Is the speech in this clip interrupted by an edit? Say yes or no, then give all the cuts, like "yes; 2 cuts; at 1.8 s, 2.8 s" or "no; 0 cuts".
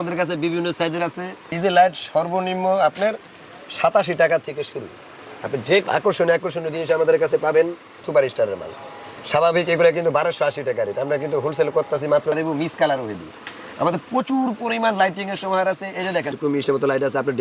yes; 5 cuts; at 1.5 s, 5.9 s, 8.0 s, 12.3 s, 16.3 s